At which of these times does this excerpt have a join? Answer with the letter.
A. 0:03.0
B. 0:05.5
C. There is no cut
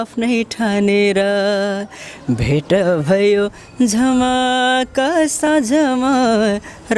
C